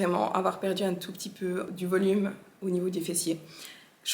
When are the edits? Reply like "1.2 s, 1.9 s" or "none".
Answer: 1.7 s